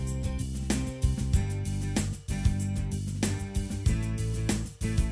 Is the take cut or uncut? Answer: uncut